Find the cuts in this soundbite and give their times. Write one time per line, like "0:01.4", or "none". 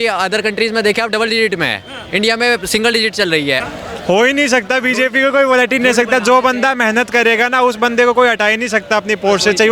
0:03.6